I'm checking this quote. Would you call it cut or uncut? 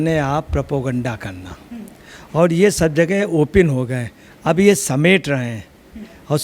uncut